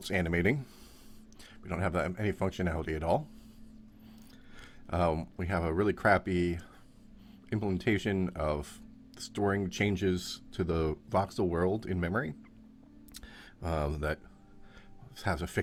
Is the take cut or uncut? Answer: uncut